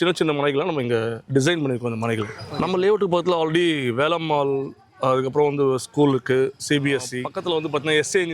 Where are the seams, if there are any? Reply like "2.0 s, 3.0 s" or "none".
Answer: 2.4 s

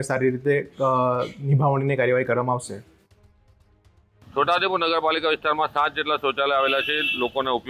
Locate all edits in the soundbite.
none

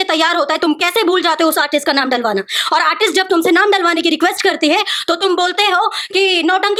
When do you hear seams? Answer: none

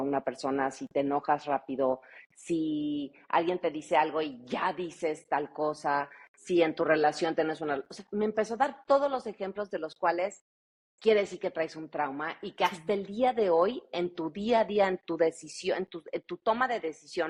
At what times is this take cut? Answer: none

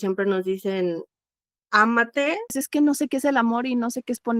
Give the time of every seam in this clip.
2.5 s

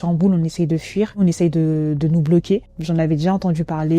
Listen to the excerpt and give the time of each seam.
1.2 s, 2.7 s

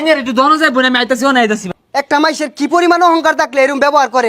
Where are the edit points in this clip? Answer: 1.7 s

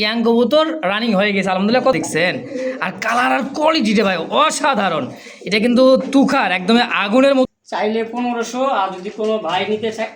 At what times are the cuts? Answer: 1.9 s, 7.4 s

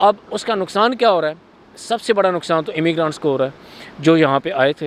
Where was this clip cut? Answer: none

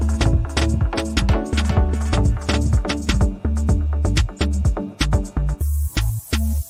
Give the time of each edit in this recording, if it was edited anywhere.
none

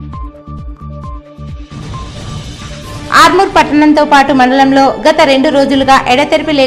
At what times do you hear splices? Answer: 0.7 s, 1.3 s

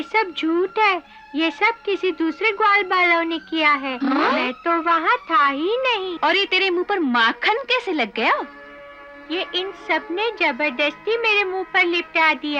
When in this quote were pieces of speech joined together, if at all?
none

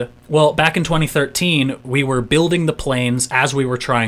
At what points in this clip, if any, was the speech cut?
none

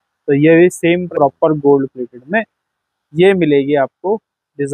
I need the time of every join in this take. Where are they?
1.1 s

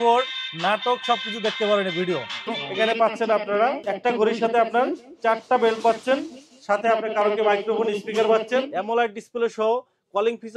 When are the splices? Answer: 2.6 s, 8.7 s

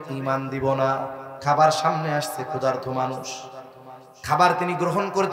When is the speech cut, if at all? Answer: 1.2 s

